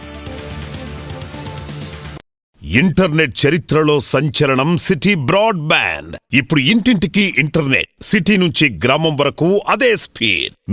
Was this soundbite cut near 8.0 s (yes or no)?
no